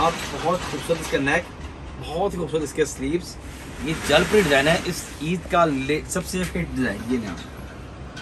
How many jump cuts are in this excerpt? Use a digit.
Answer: 0